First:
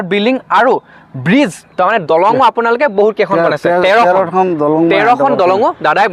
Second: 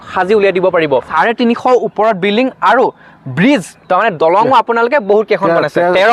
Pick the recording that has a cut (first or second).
second